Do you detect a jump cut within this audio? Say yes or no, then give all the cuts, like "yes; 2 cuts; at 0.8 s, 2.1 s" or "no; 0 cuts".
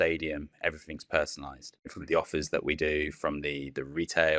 yes; 1 cut; at 2.0 s